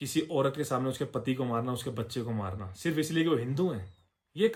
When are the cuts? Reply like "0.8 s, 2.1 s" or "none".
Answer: none